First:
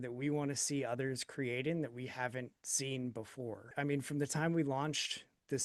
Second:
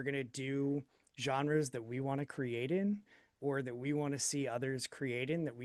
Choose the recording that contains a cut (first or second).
first